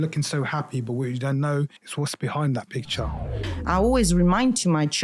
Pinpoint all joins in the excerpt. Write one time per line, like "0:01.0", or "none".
0:01.8
0:03.4